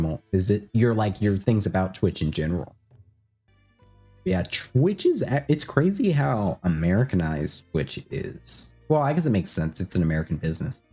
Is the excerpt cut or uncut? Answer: cut